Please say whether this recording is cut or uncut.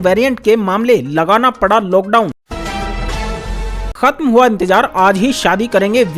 cut